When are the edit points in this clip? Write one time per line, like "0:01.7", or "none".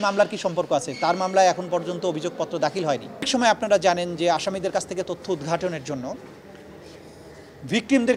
0:03.3

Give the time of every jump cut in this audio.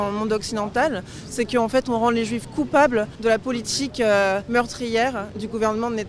0:03.1
0:04.4

